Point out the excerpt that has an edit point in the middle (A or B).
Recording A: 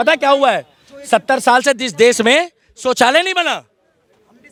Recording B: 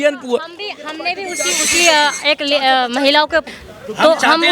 B